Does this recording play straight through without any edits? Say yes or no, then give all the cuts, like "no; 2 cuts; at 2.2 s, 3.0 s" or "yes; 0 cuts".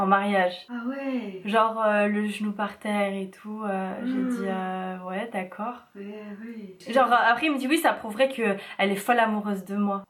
yes; 0 cuts